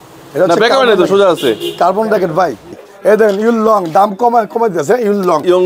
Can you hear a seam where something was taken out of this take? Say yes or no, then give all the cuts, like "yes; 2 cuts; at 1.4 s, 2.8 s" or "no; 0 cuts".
yes; 1 cut; at 2.9 s